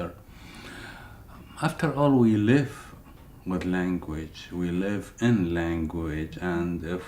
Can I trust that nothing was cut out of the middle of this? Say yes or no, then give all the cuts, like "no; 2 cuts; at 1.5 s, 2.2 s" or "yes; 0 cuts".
no; 1 cut; at 4.8 s